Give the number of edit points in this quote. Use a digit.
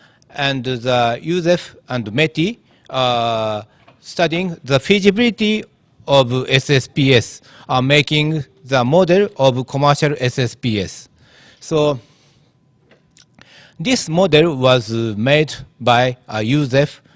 0